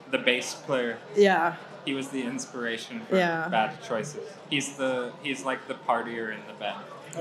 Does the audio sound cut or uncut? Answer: uncut